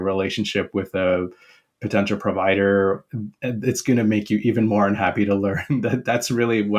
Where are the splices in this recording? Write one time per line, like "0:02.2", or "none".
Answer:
none